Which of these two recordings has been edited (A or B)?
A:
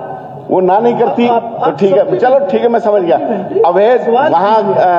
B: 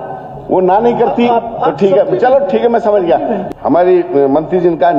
B